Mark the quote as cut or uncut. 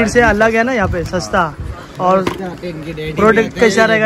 uncut